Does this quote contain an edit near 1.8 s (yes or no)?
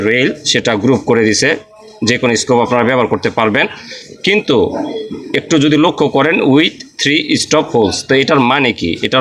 no